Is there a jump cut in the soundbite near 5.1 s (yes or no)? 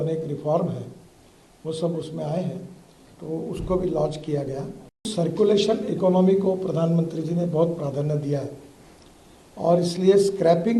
yes